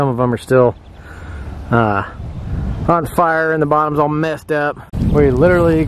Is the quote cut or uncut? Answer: cut